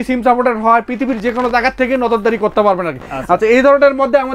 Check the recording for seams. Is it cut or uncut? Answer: uncut